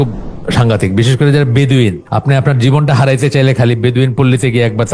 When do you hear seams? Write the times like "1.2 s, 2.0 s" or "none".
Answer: 2.1 s